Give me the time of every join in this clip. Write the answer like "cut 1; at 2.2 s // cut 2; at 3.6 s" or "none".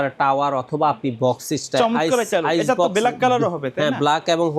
none

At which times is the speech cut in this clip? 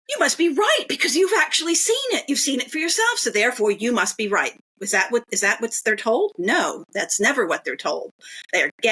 none

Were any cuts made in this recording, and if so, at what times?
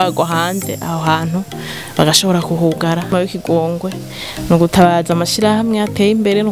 cut 1; at 3.1 s

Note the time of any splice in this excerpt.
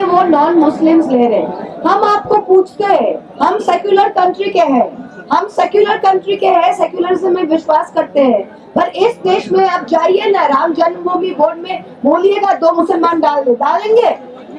none

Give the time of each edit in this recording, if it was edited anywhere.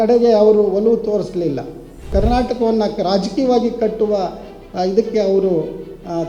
cut 1; at 2.1 s

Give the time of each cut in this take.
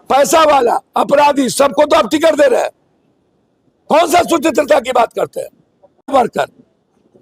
cut 1; at 6.1 s

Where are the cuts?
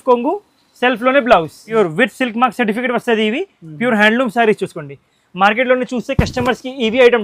cut 1; at 1.7 s

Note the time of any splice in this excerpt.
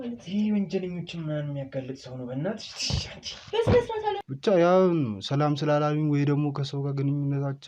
cut 1; at 4.2 s

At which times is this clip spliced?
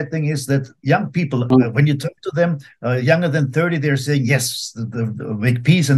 cut 1; at 1.5 s

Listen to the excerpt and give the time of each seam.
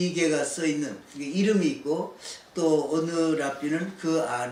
none

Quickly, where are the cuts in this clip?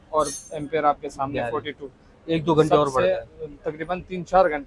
none

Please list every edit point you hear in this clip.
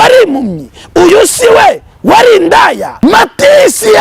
cut 1; at 2.9 s

